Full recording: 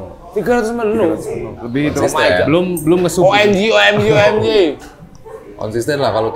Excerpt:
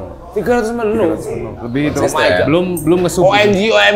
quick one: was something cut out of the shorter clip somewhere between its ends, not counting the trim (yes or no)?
no